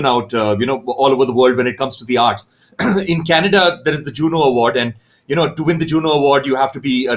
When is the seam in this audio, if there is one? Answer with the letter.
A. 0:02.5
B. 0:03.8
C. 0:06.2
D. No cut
D